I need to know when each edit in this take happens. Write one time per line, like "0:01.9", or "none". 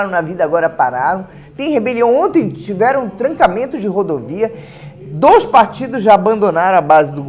none